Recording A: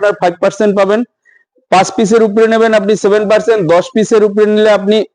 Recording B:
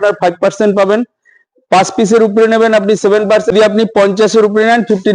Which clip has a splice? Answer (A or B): B